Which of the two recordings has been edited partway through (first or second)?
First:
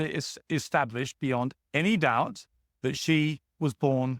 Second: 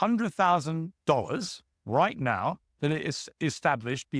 second